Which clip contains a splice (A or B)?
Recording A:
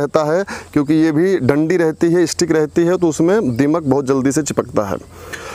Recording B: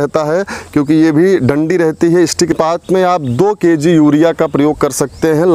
B